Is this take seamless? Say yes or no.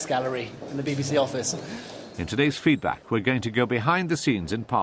no